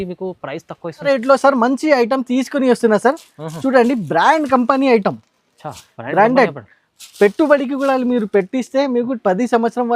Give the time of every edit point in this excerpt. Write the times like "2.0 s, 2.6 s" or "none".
1.0 s